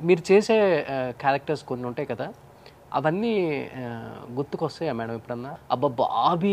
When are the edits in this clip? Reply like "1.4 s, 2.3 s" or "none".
5.5 s